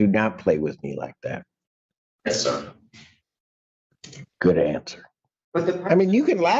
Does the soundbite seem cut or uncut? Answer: cut